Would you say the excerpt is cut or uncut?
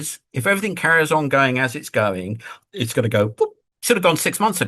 cut